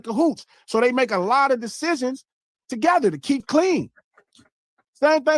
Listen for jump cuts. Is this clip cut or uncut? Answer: cut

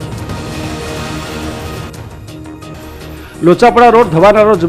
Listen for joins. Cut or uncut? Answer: cut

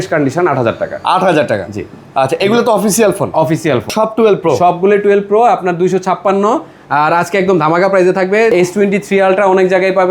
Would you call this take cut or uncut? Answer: cut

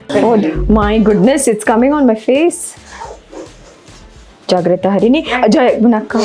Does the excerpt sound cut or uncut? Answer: uncut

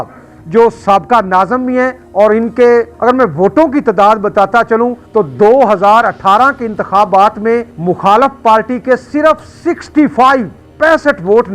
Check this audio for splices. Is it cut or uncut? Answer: cut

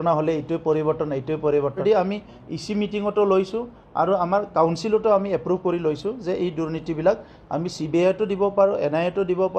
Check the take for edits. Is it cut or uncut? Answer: cut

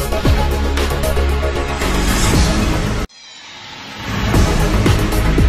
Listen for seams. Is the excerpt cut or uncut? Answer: uncut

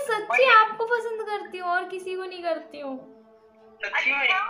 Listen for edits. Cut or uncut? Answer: uncut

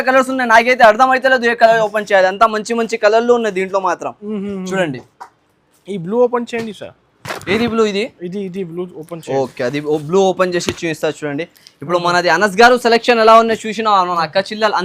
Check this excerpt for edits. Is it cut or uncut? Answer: uncut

